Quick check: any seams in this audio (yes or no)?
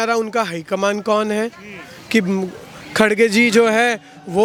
no